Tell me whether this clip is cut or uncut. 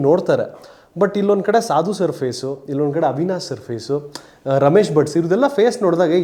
uncut